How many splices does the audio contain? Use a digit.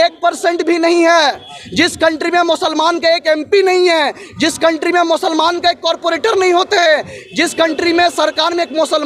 0